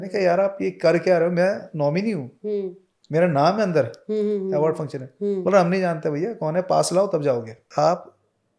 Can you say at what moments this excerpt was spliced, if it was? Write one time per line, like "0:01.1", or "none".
0:07.7